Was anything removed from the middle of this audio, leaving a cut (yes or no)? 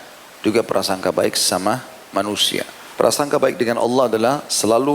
yes